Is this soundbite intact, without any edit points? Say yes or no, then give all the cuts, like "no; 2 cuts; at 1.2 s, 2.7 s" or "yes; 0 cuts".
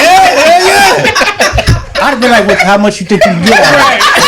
yes; 0 cuts